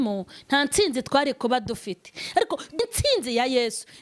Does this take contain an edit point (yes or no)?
yes